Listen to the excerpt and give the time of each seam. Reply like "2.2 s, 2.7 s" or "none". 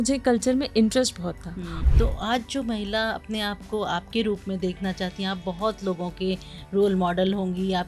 1.7 s